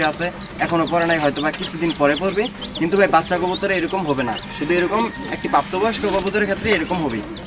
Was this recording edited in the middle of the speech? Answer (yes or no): no